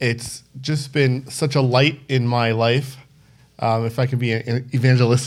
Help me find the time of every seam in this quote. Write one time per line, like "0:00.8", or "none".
none